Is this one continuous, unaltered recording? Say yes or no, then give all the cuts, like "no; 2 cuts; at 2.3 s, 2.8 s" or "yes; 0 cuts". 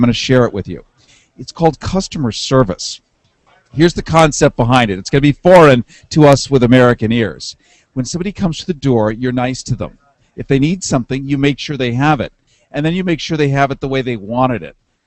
no; 1 cut; at 13.7 s